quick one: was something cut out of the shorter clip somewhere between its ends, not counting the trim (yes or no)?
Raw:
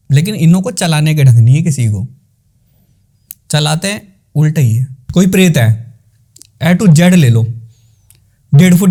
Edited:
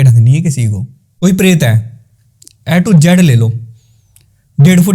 yes